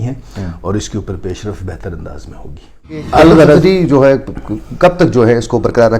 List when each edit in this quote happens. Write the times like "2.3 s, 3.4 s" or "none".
3.1 s